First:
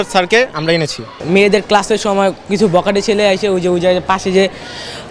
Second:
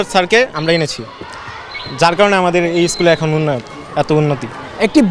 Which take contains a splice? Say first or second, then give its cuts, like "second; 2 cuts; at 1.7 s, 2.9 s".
first; 1 cut; at 1.2 s